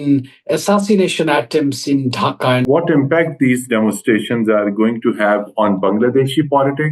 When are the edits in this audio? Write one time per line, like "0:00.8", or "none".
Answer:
0:02.6